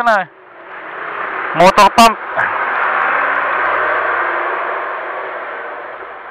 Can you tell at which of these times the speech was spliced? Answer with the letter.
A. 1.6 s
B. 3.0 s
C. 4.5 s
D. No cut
D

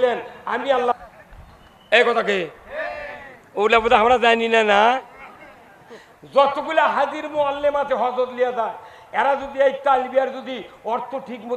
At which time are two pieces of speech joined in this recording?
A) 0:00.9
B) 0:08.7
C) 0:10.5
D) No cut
A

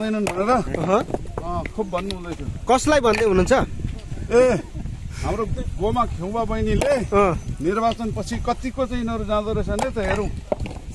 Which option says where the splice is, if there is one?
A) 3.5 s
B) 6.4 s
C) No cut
C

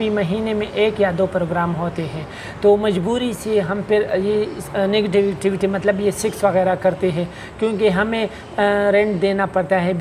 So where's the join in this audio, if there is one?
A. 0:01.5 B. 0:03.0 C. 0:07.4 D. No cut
D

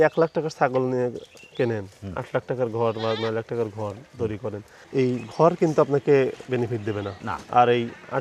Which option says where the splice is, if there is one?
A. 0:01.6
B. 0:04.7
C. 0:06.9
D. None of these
B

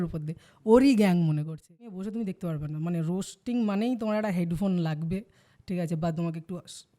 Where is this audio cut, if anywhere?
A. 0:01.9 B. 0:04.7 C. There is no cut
A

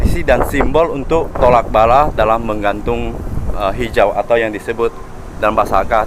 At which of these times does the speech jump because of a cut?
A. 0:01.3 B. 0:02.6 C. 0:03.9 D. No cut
A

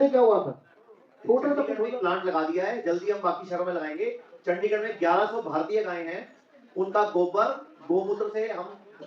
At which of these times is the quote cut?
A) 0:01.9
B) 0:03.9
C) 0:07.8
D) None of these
A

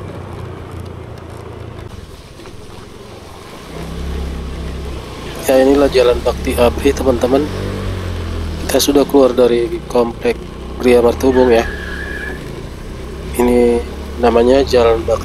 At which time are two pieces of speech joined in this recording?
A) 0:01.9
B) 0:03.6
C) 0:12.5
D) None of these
A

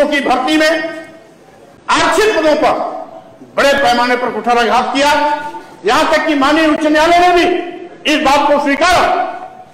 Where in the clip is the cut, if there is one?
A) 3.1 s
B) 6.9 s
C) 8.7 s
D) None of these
D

